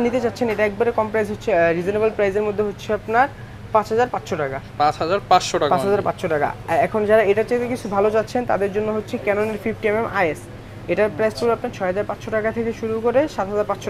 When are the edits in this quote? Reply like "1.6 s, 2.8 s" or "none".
none